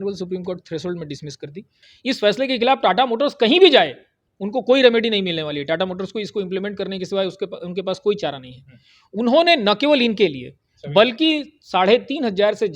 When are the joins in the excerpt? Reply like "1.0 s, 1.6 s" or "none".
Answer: 1.9 s